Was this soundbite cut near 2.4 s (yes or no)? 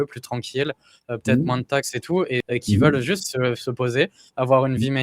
yes